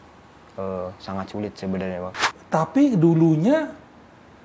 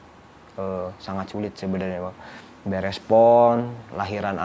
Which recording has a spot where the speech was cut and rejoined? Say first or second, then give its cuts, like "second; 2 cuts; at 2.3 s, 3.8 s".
first; 1 cut; at 2.3 s